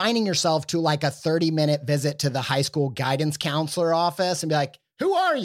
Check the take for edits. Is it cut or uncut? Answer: uncut